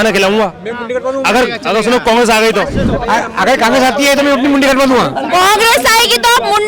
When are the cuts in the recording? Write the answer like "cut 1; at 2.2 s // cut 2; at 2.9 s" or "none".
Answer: cut 1; at 2.9 s

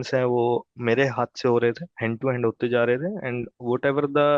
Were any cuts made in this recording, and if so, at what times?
none

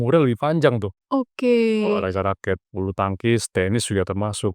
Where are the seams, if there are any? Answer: cut 1; at 1.0 s

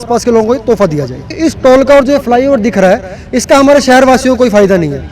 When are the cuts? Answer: cut 1; at 1.3 s

